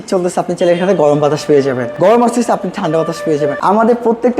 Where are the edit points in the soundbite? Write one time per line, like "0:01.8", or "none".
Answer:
0:01.9
0:03.6